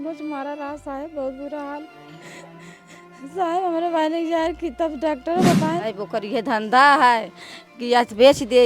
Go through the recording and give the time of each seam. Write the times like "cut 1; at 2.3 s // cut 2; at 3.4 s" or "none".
cut 1; at 5.8 s